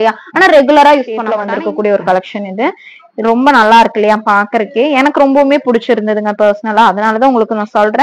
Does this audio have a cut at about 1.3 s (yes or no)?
yes